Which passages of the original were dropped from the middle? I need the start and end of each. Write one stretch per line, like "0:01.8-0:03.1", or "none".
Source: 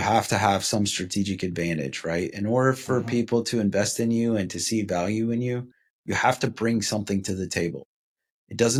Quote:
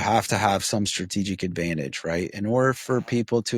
none